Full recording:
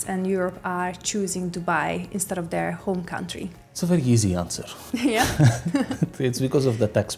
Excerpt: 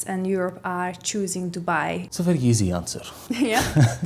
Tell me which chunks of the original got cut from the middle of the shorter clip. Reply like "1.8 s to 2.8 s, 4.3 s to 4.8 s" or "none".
2.1 s to 3.7 s